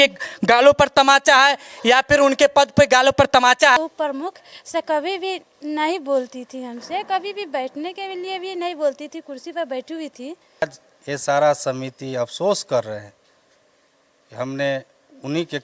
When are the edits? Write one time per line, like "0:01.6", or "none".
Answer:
0:03.8
0:10.6